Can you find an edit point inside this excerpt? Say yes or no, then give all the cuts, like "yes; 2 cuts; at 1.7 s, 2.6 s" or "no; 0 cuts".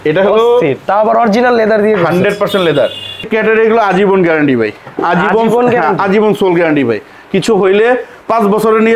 yes; 1 cut; at 3.2 s